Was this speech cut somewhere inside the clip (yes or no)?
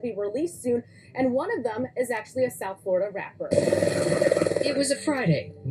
yes